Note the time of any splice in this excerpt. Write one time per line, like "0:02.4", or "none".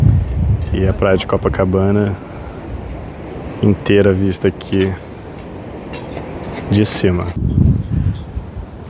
0:07.4